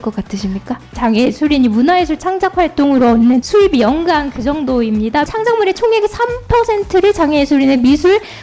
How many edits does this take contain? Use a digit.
3